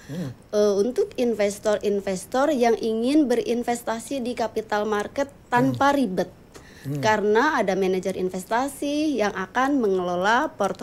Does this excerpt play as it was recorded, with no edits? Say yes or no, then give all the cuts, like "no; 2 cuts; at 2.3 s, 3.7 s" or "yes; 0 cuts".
yes; 0 cuts